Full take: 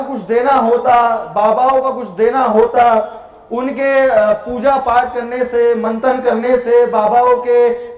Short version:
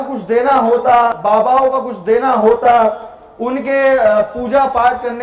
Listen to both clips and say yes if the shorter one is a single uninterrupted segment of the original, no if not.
no